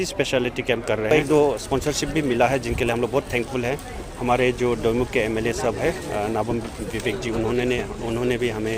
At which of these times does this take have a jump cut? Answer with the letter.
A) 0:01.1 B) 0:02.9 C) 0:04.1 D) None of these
A